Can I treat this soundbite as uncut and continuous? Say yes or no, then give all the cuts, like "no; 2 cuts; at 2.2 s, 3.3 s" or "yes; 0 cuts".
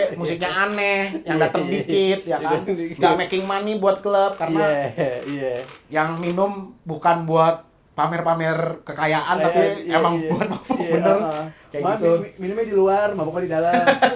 yes; 0 cuts